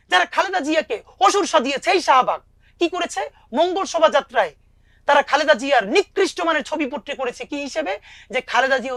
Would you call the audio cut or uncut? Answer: uncut